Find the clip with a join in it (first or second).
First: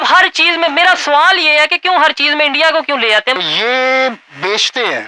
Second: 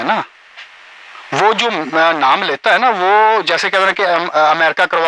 first